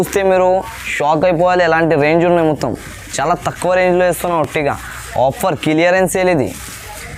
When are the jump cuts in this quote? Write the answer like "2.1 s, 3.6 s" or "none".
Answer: none